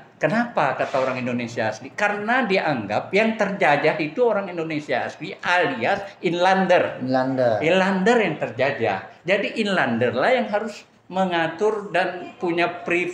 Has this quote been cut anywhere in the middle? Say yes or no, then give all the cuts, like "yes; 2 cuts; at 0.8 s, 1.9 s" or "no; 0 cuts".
no; 0 cuts